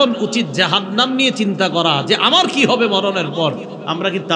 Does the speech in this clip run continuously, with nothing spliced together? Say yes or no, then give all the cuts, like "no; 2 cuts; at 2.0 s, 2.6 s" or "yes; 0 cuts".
yes; 0 cuts